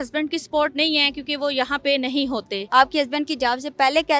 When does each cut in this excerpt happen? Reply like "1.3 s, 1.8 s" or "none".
2.6 s